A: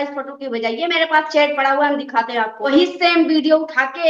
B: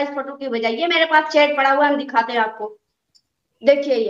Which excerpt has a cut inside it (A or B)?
A